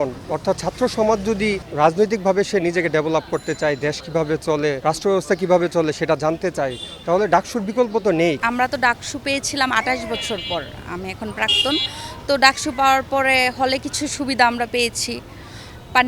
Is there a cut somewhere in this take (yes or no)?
yes